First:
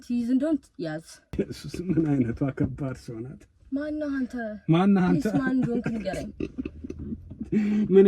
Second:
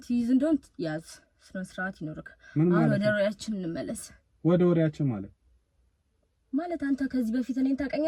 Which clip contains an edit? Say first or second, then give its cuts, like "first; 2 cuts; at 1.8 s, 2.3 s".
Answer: first; 1 cut; at 1.3 s